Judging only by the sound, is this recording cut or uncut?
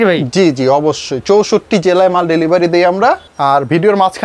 cut